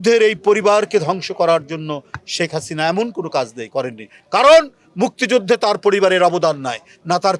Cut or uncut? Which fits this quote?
uncut